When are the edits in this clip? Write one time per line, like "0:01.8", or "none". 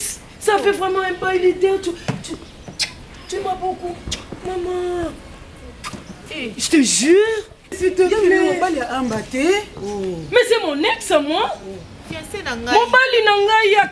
0:07.7